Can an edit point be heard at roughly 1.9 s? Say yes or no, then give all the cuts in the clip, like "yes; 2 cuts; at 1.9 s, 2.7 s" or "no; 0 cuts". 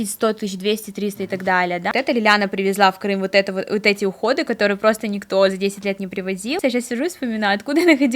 yes; 2 cuts; at 1.9 s, 6.6 s